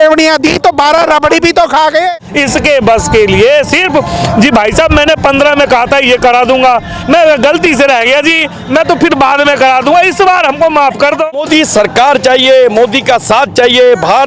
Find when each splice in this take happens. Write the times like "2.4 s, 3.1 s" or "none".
2.1 s, 11.3 s